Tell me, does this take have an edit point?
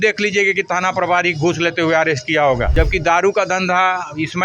yes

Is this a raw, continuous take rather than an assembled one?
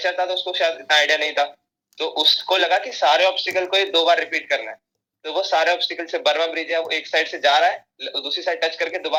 yes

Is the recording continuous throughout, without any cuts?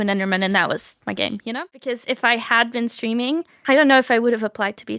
no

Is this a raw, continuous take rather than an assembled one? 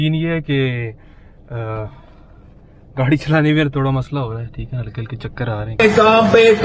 yes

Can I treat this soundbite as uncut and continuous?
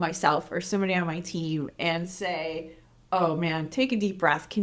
yes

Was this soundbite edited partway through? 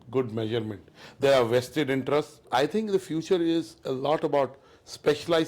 yes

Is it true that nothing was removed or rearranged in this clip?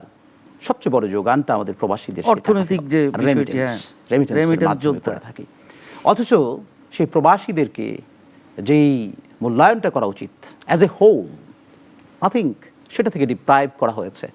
yes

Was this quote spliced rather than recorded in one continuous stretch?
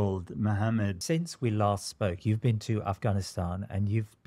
yes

